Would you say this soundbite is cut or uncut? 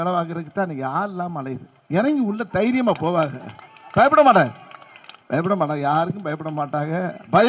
uncut